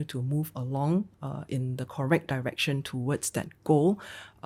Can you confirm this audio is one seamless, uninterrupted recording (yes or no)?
yes